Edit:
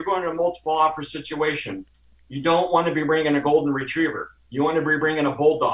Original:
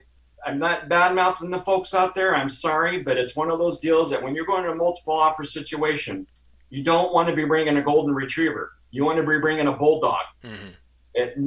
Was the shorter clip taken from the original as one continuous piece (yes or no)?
yes